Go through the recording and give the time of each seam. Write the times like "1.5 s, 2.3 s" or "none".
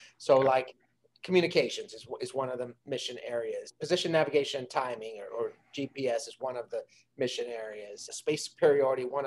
3.7 s, 8.1 s